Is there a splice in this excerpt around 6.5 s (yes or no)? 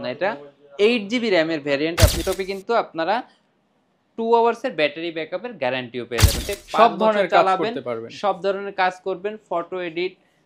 yes